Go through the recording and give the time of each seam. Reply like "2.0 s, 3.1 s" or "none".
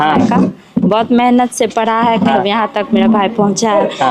2.3 s

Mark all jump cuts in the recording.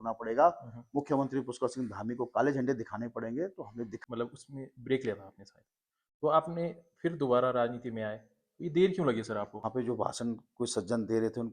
4.0 s, 9.5 s

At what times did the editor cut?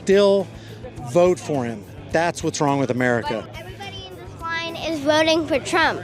3.5 s

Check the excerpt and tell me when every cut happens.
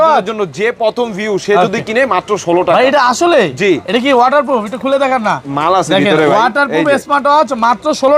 none

